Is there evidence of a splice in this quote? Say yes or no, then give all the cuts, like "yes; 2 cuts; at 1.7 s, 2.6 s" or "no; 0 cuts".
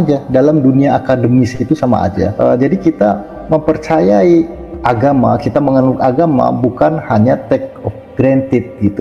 yes; 1 cut; at 2.3 s